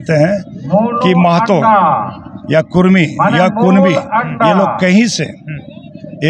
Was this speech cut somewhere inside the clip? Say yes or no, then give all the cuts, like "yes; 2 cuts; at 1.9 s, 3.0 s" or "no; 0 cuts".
no; 0 cuts